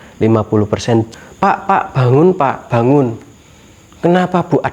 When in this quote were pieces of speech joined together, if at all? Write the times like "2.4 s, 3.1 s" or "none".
1.1 s